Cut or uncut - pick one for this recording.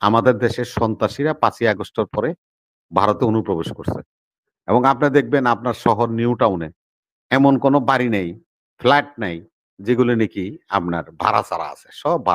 uncut